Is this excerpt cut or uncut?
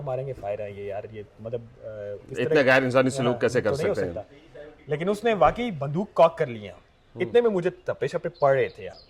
uncut